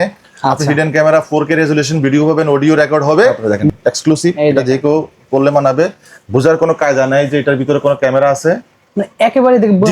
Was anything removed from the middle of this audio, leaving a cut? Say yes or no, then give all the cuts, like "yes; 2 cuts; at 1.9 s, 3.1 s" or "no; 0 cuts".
yes; 1 cut; at 3.5 s